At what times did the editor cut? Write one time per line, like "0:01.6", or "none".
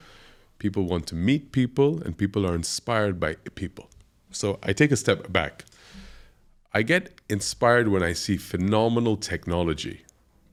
none